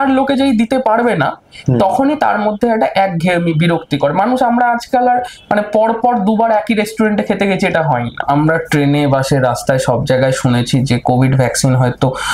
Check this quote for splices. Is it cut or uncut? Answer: cut